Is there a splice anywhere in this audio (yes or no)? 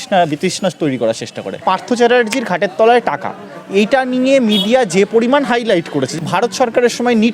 yes